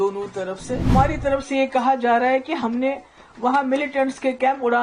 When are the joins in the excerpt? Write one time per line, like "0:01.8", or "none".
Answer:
0:00.9